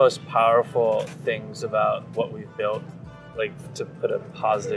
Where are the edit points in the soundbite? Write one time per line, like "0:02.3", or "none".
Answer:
none